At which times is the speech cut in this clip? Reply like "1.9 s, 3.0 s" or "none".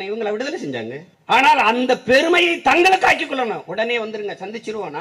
1.1 s